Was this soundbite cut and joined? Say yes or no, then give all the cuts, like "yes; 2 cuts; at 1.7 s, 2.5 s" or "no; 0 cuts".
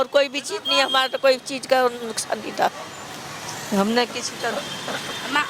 no; 0 cuts